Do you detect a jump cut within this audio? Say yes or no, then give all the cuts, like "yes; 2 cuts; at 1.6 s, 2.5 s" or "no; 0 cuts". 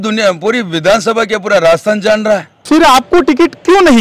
yes; 1 cut; at 2.6 s